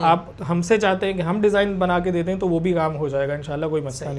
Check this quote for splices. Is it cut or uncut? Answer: uncut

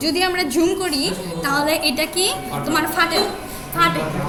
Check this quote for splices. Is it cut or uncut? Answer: uncut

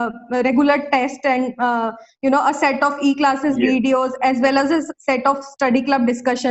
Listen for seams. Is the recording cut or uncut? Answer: uncut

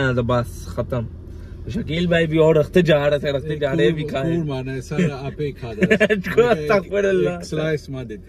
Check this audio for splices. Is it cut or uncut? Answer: cut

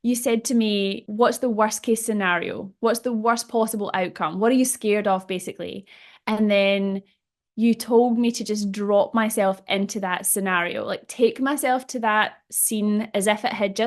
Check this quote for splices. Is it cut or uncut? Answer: cut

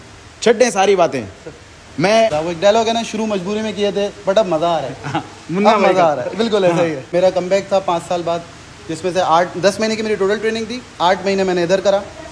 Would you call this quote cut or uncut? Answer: cut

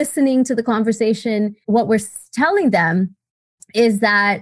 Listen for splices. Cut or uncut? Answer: cut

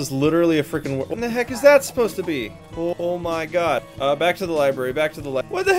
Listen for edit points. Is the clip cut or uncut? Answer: cut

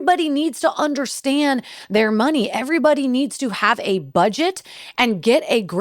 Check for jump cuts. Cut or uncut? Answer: uncut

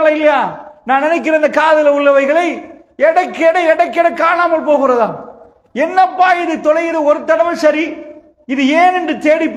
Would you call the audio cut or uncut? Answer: uncut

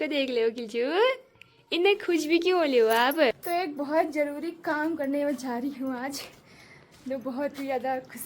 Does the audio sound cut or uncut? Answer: cut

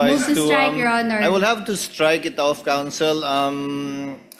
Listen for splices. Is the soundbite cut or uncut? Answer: uncut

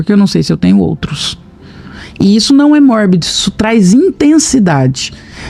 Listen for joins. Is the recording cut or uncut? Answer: uncut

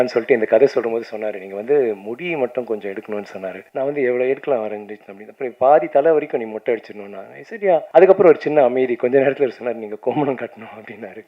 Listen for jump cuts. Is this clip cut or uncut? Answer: cut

